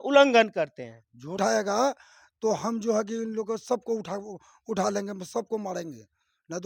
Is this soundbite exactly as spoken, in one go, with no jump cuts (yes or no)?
no